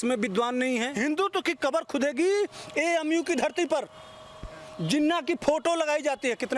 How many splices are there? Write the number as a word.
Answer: one